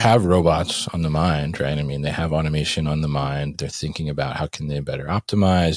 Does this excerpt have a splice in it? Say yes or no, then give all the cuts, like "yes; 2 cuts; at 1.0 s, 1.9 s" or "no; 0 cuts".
no; 0 cuts